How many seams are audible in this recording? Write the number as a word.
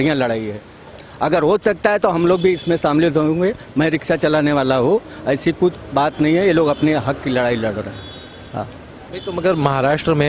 zero